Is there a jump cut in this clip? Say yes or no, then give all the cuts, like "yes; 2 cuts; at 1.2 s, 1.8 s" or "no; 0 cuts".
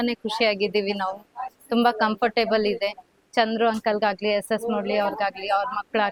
no; 0 cuts